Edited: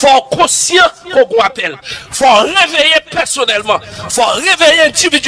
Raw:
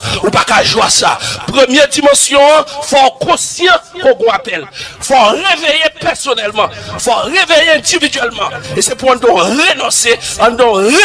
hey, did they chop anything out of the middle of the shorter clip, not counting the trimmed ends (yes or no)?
no